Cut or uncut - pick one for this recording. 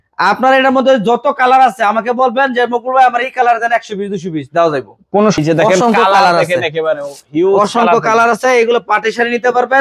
cut